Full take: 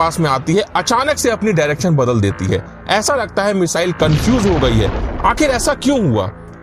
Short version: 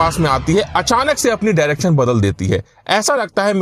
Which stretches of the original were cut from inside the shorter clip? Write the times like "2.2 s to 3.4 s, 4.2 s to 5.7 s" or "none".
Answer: none